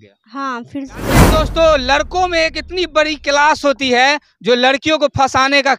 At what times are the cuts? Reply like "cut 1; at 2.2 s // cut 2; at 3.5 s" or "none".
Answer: cut 1; at 1.3 s

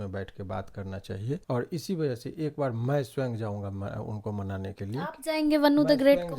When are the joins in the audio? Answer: cut 1; at 1.4 s

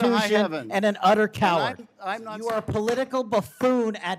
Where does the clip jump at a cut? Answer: cut 1; at 2.3 s

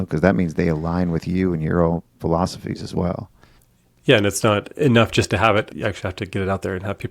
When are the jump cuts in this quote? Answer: cut 1; at 5.7 s

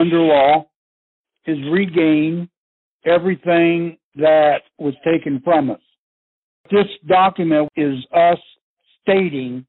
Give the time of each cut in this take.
cut 1; at 6.7 s // cut 2; at 7.7 s

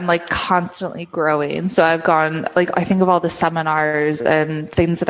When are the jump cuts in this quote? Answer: none

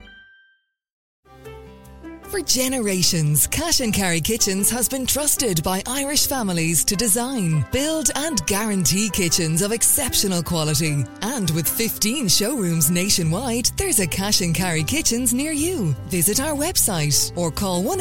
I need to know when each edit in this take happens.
cut 1; at 1.0 s

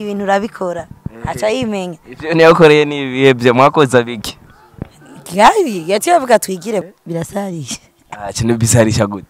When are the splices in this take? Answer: cut 1; at 6.8 s

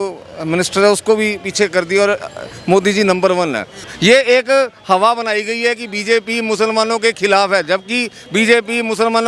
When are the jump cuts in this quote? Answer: cut 1; at 3.8 s

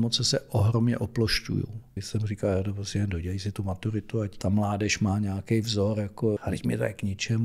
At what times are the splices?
cut 1; at 2.0 s // cut 2; at 4.4 s // cut 3; at 6.4 s

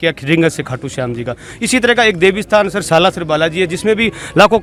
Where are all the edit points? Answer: none

